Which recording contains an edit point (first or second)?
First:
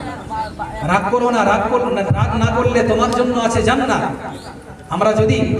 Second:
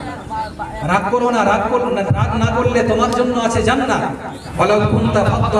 second